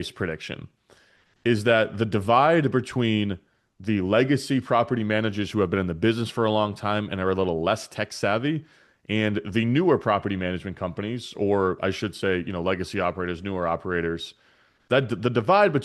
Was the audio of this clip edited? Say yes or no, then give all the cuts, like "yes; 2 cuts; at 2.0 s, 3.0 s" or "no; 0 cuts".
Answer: no; 0 cuts